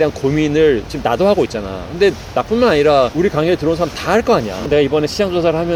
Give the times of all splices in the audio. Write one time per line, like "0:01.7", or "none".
none